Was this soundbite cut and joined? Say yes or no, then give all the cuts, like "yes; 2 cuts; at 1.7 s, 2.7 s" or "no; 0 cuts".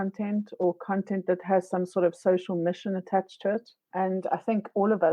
yes; 1 cut; at 3.8 s